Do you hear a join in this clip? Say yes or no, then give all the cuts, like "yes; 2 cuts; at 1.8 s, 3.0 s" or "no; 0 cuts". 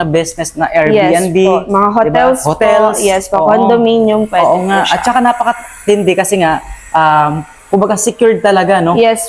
no; 0 cuts